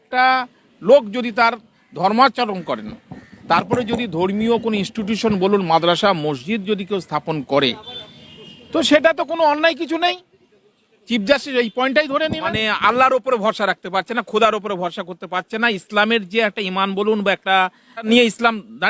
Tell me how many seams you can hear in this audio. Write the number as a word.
two